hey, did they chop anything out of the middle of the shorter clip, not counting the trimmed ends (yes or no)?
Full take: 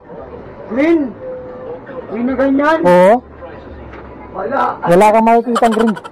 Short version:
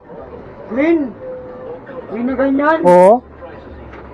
no